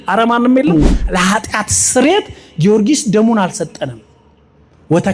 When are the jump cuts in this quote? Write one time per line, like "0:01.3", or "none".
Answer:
0:01.0